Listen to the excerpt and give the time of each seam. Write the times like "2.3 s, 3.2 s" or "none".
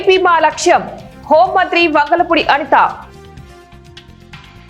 none